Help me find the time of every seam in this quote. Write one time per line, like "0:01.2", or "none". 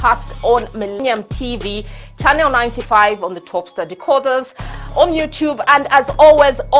0:01.0